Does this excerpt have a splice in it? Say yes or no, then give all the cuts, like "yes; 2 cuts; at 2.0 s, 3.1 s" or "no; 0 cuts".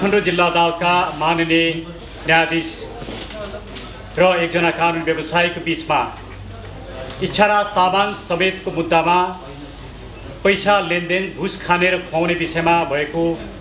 no; 0 cuts